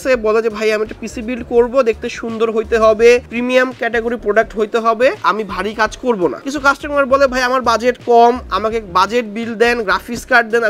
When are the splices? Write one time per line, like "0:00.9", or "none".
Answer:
0:05.2
0:06.4